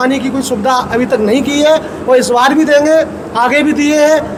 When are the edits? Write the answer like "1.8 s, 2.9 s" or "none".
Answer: none